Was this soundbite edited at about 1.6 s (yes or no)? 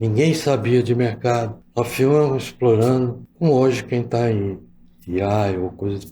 yes